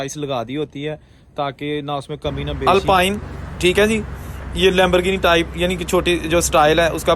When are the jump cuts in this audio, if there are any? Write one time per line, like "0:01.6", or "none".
0:02.6